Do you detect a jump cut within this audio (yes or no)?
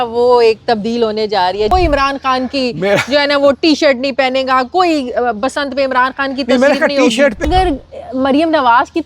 yes